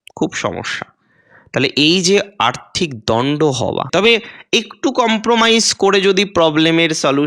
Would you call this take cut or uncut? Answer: cut